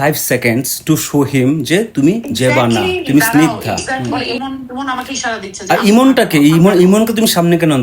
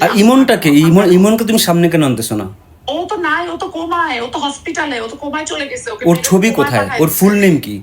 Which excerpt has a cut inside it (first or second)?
first